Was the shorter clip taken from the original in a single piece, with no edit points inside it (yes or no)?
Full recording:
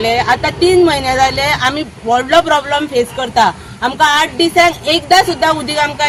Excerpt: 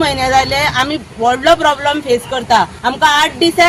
no